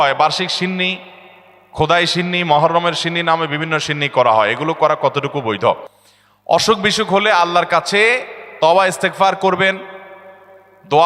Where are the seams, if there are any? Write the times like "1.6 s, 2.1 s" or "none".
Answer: none